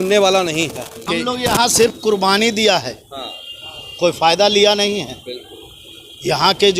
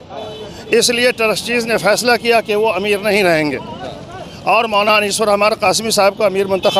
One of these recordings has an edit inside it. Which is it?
first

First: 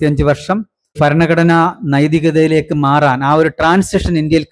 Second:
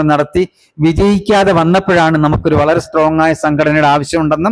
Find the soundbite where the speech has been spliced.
first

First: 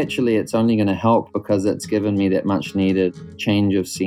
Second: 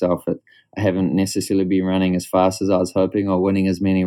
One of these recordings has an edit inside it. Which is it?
first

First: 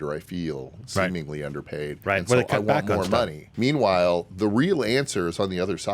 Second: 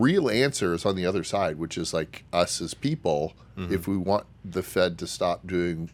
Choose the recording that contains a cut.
first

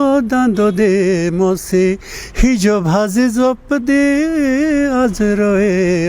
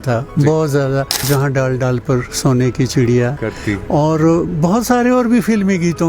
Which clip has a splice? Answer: second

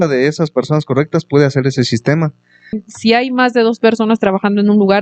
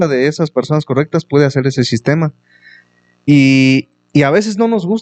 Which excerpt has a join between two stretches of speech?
first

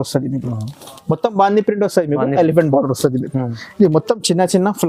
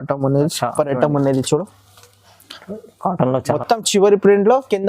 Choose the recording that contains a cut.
second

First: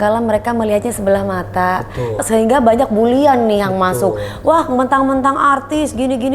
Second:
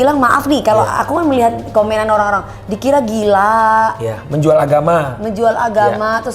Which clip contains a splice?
first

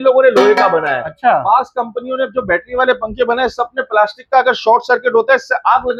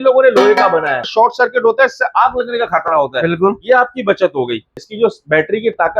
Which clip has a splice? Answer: second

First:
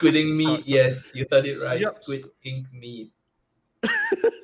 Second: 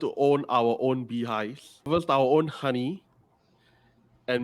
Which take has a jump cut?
second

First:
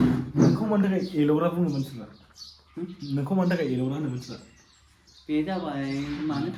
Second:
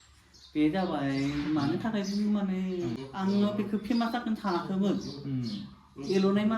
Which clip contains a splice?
second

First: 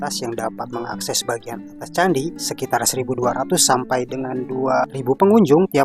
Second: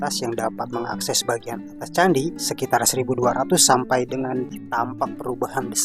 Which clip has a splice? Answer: second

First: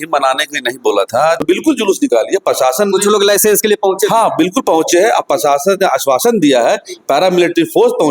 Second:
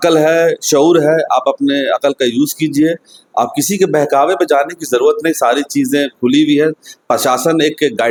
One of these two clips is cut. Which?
first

